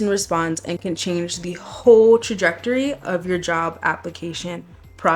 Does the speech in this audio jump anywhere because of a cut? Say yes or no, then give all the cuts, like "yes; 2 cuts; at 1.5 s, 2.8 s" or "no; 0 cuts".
no; 0 cuts